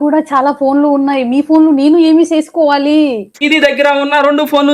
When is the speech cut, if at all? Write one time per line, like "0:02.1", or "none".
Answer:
0:03.3